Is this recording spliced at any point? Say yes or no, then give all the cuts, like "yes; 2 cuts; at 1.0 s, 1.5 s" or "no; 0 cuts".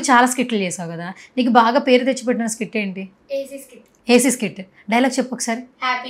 no; 0 cuts